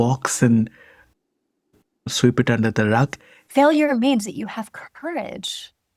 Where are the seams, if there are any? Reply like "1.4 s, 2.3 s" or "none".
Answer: 3.3 s